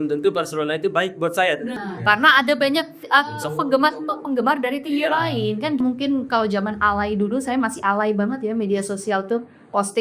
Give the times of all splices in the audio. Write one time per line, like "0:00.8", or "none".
0:01.8
0:05.8